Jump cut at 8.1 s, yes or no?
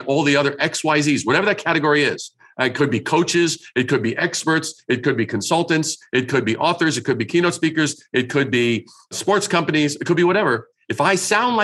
no